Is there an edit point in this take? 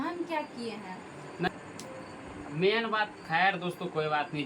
yes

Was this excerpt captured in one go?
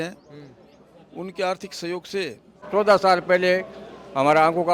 no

